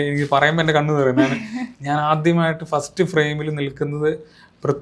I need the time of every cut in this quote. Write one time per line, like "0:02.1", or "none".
none

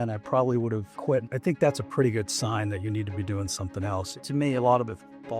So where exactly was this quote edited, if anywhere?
0:01.2
0:04.2

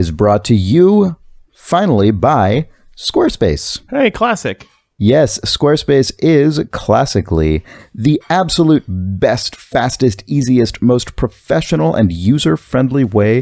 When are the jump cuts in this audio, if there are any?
none

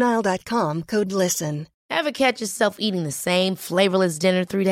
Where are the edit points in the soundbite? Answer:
0:01.7

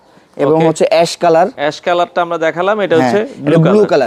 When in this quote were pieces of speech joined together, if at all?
none

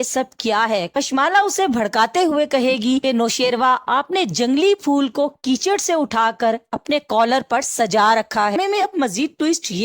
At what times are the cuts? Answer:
0:08.5

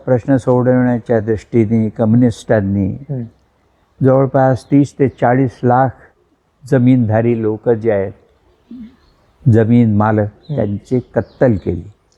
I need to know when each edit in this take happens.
none

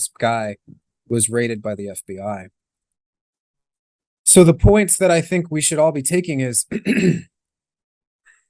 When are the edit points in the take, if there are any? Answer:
none

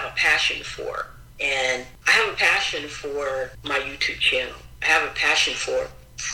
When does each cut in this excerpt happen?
0:01.9
0:03.6

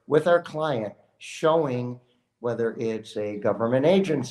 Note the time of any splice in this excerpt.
none

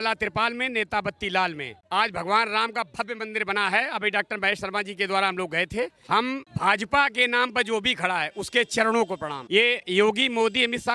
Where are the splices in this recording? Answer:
none

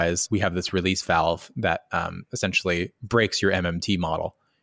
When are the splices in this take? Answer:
none

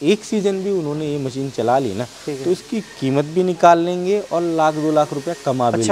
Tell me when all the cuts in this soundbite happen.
none

